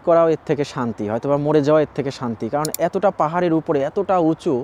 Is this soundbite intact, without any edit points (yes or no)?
yes